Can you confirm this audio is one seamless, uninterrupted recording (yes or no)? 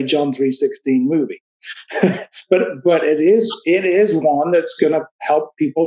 yes